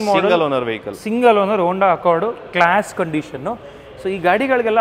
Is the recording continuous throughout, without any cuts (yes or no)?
yes